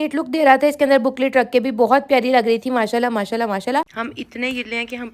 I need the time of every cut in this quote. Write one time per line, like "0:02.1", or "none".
0:03.9